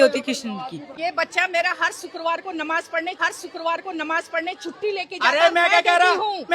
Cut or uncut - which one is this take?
cut